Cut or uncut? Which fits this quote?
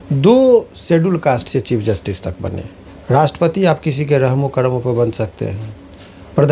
cut